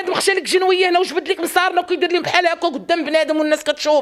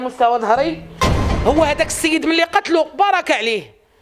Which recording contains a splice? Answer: second; 1 cut; at 1.0 s

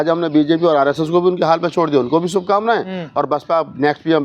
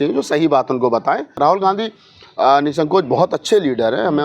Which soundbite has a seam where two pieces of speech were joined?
second; 1 cut; at 1.4 s

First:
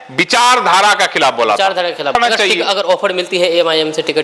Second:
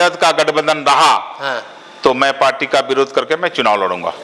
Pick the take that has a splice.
first; 1 cut; at 2.1 s

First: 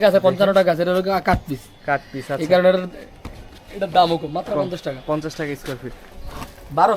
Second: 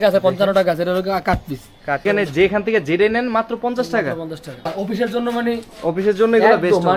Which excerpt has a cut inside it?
second; 2 cuts; at 2.0 s, 4.7 s

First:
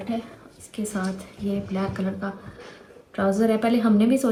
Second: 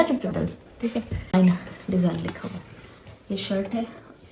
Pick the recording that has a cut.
second; 1 cut; at 1.3 s

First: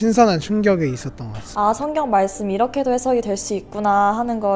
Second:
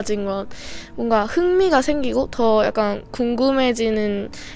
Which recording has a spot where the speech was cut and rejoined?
first; 1 cut; at 1.4 s

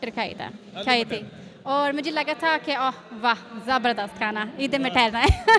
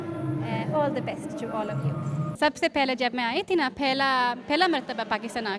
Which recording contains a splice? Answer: second; 1 cut; at 2.3 s

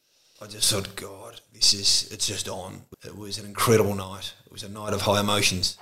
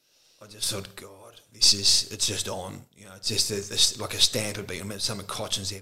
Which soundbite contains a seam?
first; 1 cut; at 2.9 s

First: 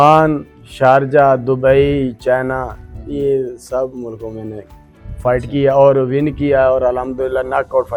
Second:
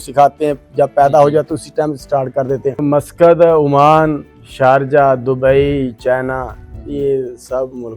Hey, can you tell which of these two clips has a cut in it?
second; 1 cut; at 2.8 s

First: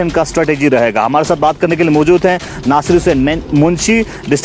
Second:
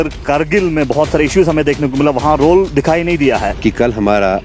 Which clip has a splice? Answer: second; 1 cut; at 3.5 s

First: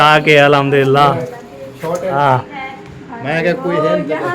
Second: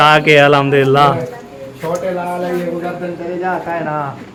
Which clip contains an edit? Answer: first; 1 cut; at 2.1 s

